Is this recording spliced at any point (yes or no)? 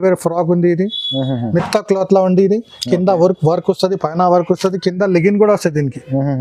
no